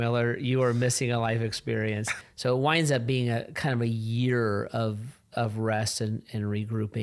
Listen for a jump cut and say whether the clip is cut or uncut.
cut